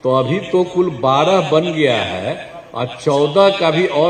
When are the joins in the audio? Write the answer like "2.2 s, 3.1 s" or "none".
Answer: none